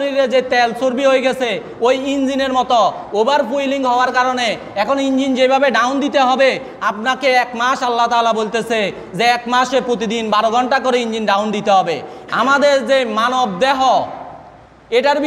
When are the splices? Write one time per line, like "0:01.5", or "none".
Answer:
0:12.1